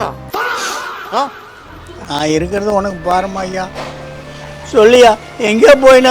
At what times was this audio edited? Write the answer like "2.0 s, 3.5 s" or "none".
none

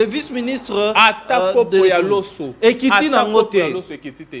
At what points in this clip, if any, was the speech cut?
none

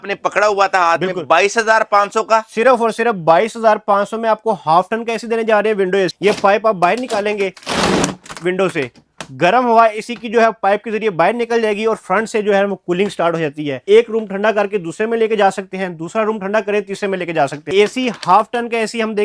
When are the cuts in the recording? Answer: 6.1 s, 13.8 s, 17.6 s

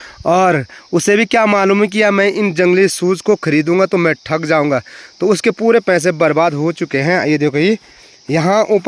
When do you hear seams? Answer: none

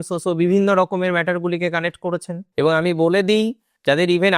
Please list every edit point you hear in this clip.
2.4 s

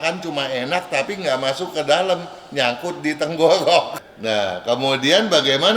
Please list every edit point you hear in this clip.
4.0 s

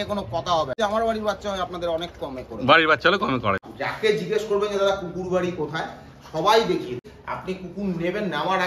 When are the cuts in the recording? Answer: 0.8 s, 3.7 s, 7.1 s

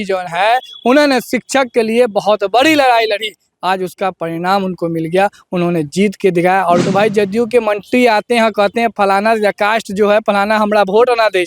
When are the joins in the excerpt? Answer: 6.8 s

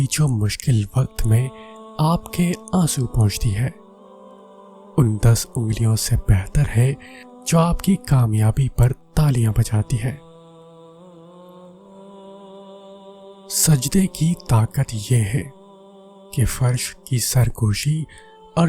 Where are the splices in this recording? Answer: 10.2 s, 12.2 s, 13.6 s

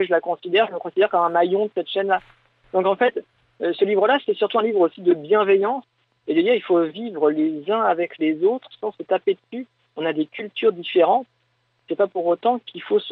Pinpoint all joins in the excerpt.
none

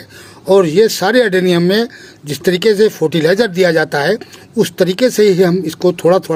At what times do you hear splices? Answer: none

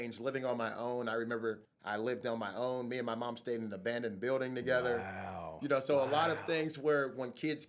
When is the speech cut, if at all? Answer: 1.7 s

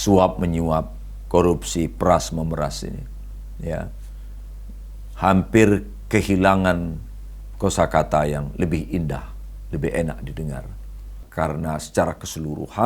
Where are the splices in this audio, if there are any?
11.2 s

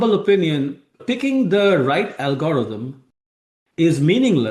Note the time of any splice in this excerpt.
0.9 s

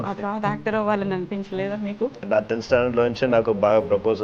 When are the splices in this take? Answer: 2.3 s

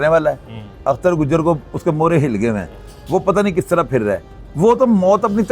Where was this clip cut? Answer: none

